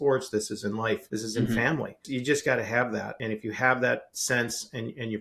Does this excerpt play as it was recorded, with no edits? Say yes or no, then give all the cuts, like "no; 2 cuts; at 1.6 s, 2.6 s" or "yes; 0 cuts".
no; 4 cuts; at 1.1 s, 2.0 s, 3.1 s, 4.1 s